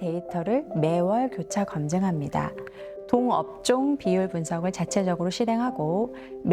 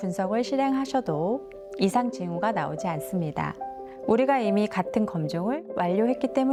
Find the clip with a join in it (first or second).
first